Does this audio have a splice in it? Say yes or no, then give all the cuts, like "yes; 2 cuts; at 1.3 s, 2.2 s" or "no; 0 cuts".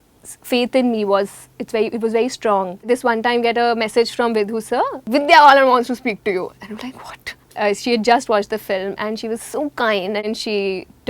yes; 4 cuts; at 2.9 s, 5.1 s, 7.4 s, 10.3 s